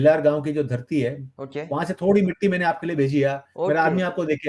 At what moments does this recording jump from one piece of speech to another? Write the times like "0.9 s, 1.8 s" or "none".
none